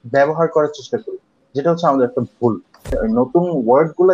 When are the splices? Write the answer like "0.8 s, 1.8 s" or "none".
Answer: 2.8 s

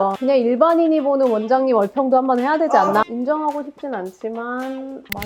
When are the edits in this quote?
3.0 s

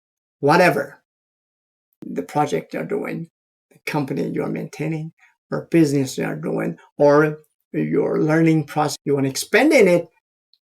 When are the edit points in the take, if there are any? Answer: 8.9 s

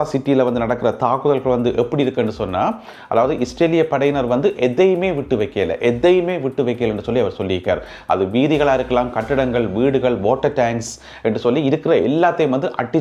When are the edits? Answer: none

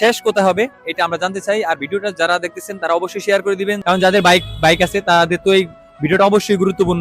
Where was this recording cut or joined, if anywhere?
3.8 s

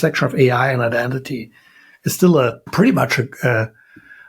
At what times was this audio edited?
2.6 s

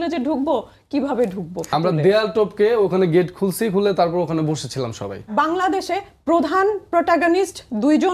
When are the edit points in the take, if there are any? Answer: 1.7 s, 5.3 s

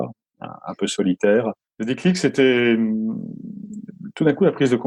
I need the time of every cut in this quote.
1.7 s

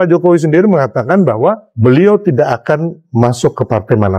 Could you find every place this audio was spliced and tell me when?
1.7 s, 3.0 s

